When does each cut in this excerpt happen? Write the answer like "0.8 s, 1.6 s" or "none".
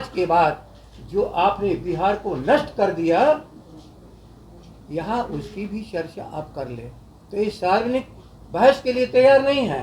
none

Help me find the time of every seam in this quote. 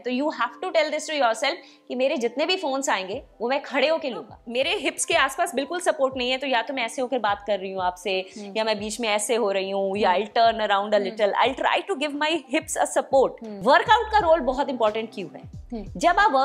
4.4 s, 13.5 s

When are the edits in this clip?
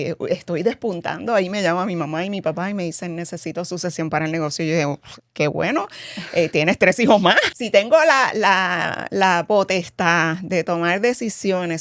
7.5 s

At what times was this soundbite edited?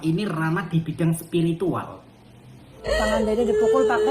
2.6 s

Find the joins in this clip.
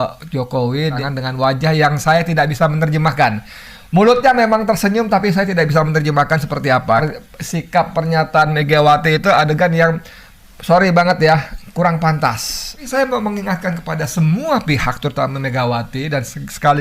1.0 s, 7.0 s, 12.8 s

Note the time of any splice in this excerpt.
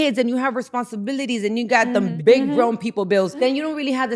2.1 s, 3.3 s

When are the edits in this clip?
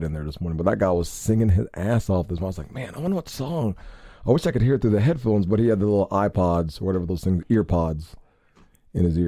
none

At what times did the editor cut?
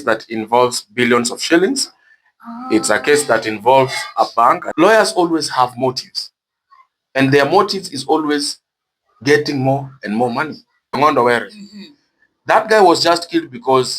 4.6 s, 10.9 s

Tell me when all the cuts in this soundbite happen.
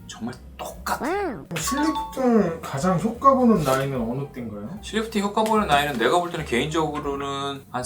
1.4 s

